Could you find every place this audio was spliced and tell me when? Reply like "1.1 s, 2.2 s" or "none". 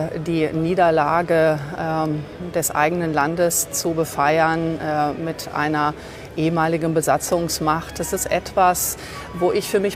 none

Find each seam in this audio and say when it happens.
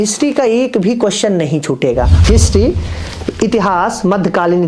2.1 s

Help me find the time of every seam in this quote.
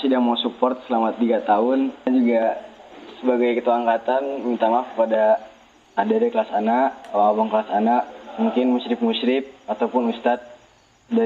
2.1 s

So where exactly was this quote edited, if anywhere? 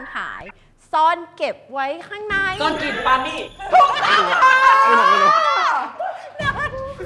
none

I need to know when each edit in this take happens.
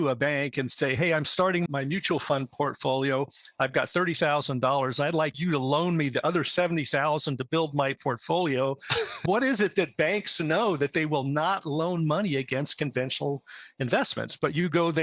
1.7 s, 5.4 s

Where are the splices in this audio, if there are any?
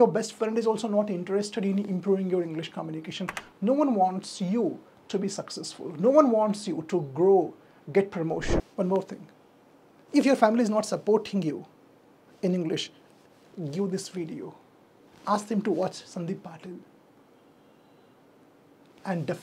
8.6 s

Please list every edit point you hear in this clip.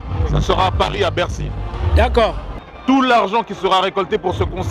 2.6 s

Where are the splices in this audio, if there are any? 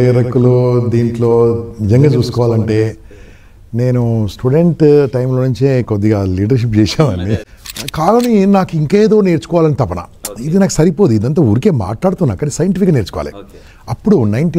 7.4 s

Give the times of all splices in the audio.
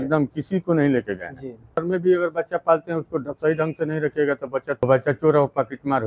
1.8 s, 4.8 s

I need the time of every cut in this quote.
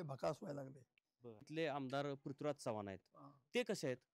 1.5 s

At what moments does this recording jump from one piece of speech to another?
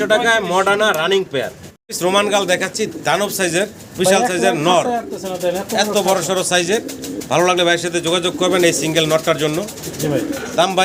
none

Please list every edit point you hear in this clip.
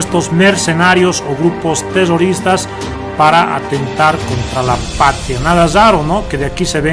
5.0 s

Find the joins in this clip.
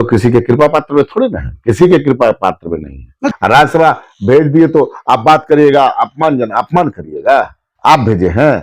3.3 s, 7.6 s

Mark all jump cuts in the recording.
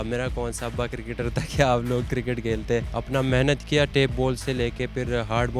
3.0 s

